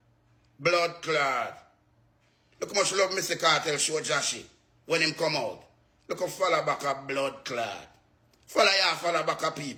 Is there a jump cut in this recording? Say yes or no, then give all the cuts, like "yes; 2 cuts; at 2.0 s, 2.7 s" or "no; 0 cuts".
no; 0 cuts